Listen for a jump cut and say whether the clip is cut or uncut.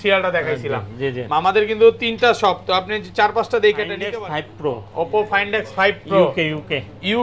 cut